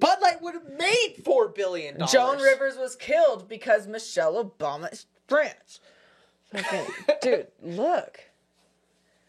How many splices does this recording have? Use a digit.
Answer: 0